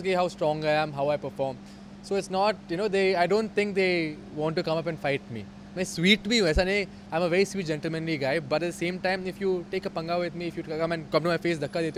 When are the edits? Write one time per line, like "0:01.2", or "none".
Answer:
none